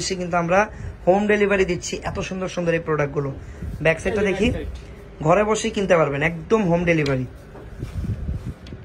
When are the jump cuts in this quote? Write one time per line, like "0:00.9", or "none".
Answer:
none